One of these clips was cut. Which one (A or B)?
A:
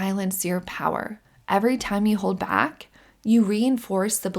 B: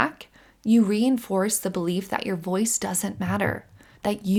A